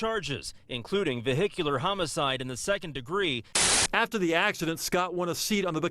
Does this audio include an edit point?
yes; 1 cut; at 3.5 s

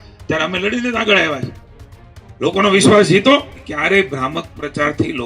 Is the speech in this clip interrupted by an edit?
yes; 1 cut; at 3.6 s

